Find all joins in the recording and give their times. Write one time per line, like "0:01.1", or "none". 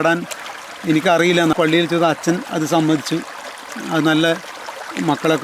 0:01.6